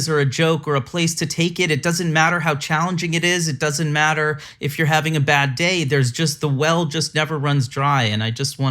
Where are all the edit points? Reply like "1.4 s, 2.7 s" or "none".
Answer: none